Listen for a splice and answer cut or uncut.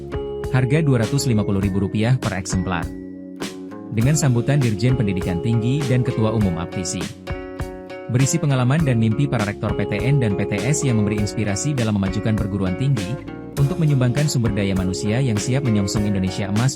uncut